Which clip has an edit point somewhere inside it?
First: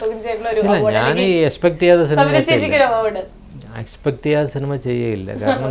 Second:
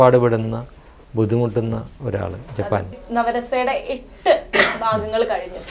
second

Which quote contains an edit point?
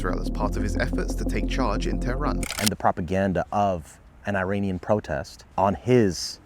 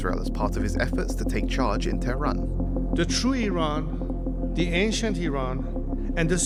first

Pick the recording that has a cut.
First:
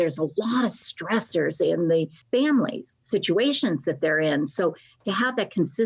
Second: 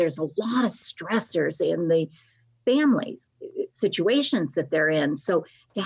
first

